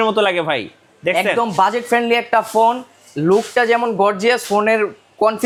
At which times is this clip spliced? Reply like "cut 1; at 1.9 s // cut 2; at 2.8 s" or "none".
none